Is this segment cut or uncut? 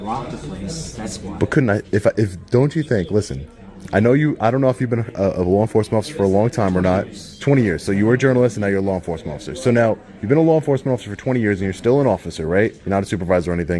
uncut